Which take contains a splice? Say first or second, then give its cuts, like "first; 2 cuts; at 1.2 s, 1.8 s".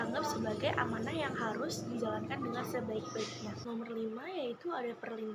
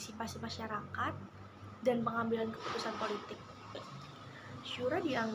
first; 1 cut; at 3.6 s